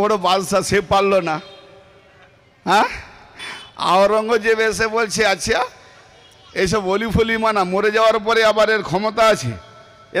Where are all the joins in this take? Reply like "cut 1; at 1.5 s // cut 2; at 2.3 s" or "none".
none